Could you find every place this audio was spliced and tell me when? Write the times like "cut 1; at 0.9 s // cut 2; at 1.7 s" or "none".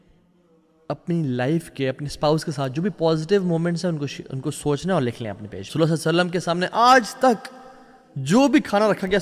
cut 1; at 5.6 s